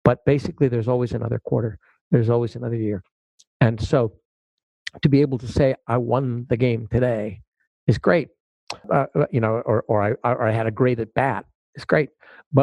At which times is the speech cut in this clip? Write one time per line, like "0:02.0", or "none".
0:08.8